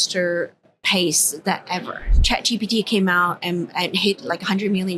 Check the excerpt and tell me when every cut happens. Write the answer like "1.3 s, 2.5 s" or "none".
2.2 s

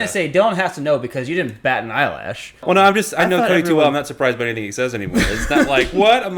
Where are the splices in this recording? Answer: 2.7 s

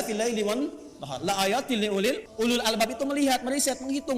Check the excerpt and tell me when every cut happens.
2.3 s

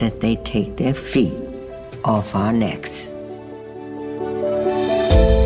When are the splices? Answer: 2.8 s

